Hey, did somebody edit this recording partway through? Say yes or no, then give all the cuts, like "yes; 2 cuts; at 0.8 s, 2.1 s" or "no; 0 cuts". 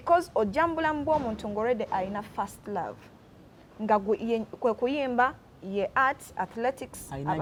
no; 0 cuts